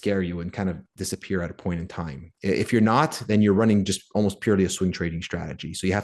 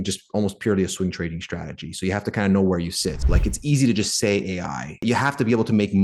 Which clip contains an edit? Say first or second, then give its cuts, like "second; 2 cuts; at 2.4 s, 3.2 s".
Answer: second; 2 cuts; at 3.2 s, 5.0 s